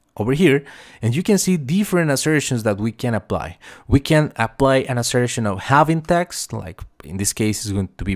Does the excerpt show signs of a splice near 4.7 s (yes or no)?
no